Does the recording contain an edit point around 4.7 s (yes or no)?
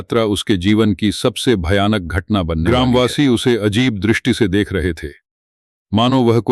no